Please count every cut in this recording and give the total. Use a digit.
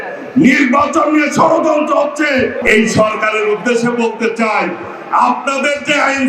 1